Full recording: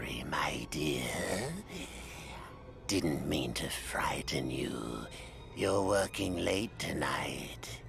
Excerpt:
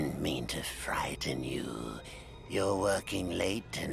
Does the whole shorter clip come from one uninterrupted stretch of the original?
yes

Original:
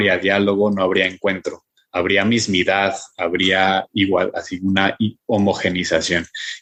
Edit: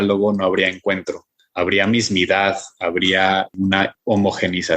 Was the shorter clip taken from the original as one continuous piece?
no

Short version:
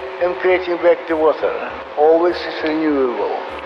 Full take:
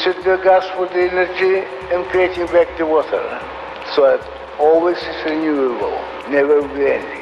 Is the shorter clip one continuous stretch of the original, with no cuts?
no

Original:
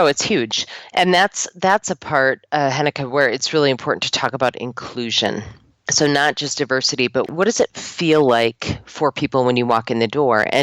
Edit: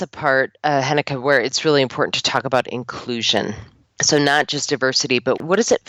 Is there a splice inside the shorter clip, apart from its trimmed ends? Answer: no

